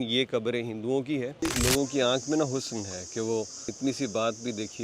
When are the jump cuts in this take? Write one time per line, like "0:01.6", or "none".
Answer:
0:01.4
0:03.7